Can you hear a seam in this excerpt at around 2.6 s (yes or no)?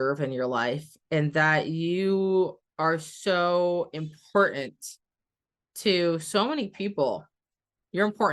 no